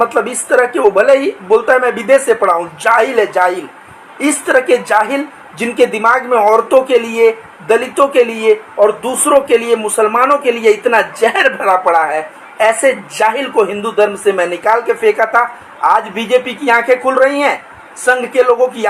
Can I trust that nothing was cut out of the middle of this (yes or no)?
yes